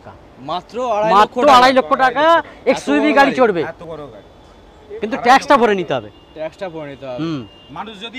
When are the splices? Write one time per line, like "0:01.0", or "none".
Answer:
none